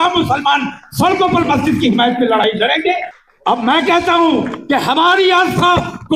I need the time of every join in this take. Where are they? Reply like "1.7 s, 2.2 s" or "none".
3.1 s